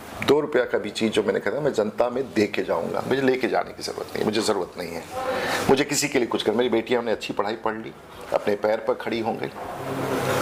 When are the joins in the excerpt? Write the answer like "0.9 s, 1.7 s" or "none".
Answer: none